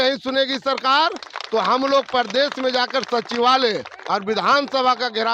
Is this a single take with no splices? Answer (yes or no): yes